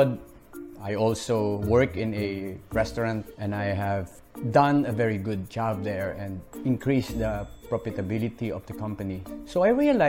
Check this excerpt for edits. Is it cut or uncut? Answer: cut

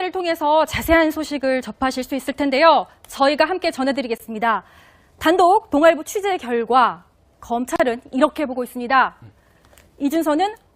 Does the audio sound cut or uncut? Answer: cut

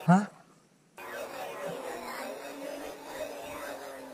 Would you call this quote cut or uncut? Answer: cut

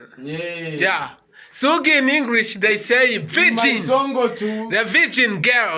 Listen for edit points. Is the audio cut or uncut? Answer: uncut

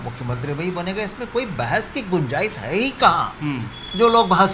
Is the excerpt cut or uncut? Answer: uncut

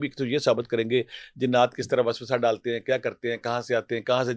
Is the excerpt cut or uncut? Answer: uncut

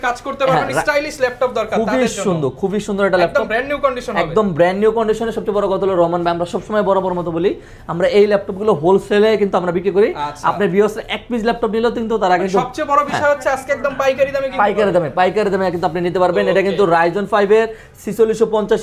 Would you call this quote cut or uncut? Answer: uncut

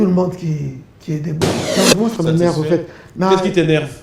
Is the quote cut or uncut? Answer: cut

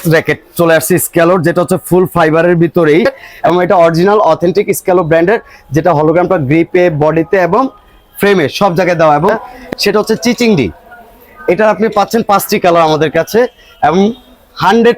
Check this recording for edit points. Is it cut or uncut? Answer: cut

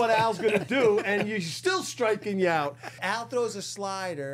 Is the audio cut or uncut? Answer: cut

